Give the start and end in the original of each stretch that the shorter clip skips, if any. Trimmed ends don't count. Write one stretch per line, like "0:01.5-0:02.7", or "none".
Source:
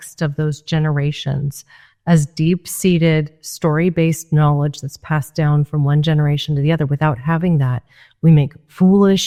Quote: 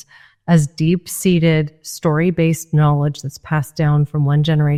none